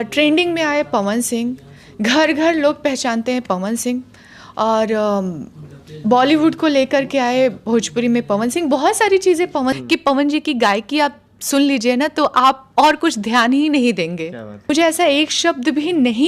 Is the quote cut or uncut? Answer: cut